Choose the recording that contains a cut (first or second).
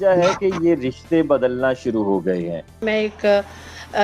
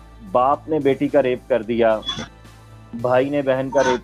first